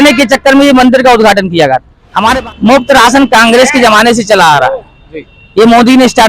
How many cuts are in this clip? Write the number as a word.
one